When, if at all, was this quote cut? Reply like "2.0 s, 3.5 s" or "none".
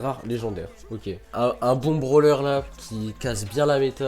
1.2 s